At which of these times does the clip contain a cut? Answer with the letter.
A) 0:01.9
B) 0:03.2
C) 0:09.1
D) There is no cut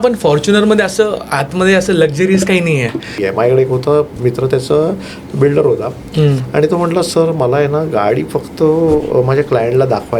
B